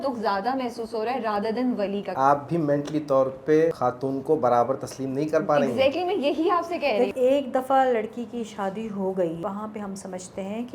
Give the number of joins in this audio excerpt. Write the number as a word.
four